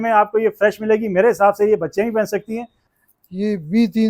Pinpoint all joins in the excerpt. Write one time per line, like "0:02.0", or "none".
0:02.8

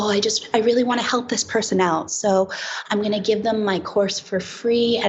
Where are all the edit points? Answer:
none

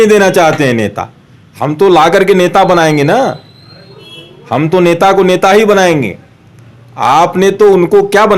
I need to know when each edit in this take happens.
none

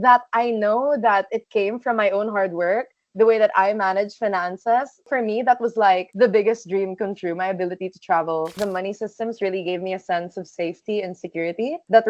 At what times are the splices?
0:05.1
0:08.5

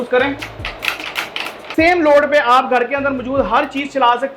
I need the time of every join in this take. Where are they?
0:01.7

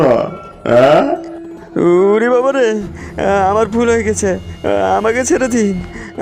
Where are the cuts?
0:01.8

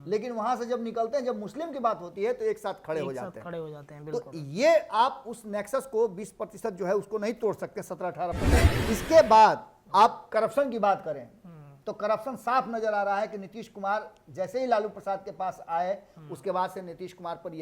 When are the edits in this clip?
0:08.7

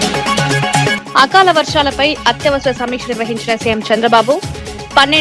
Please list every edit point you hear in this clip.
0:01.0

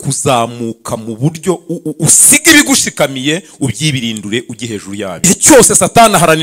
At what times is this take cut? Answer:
0:05.2

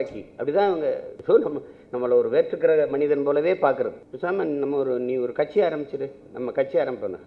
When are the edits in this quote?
0:01.1
0:04.0

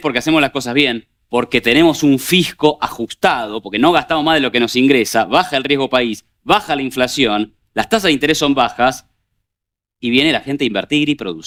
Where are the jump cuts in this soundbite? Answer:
none

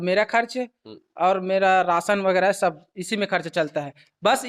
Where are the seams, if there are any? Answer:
none

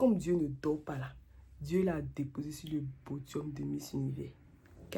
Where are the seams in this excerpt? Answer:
none

